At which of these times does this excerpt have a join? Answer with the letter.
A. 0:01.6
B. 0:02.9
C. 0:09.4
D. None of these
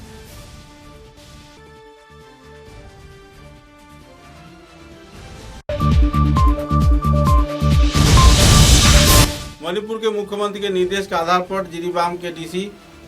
C